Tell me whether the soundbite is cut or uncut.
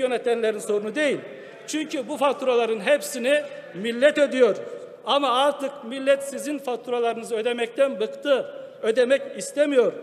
uncut